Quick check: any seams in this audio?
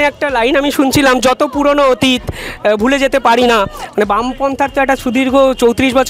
no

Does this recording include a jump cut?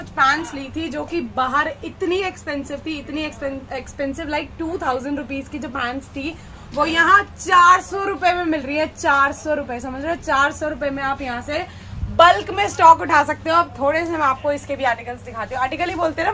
no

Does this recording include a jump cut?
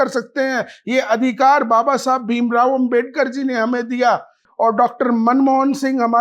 yes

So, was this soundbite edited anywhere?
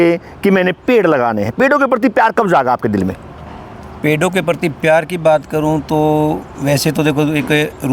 no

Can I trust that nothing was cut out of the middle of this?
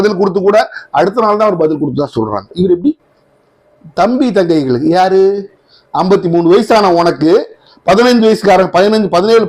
no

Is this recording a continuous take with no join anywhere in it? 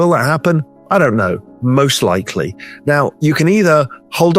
yes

